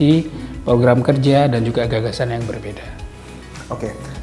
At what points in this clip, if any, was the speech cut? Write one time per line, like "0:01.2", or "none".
none